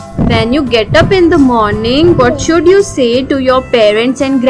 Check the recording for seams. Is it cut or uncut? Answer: uncut